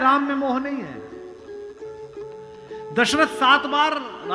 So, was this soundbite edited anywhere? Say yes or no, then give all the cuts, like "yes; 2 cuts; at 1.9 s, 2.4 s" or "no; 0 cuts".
no; 0 cuts